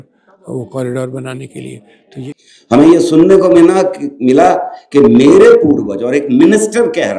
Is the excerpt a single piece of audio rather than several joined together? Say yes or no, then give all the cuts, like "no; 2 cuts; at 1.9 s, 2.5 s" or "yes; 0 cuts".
no; 1 cut; at 1.9 s